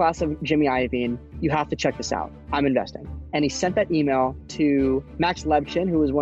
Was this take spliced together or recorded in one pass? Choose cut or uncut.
cut